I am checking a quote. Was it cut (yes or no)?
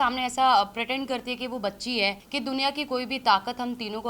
yes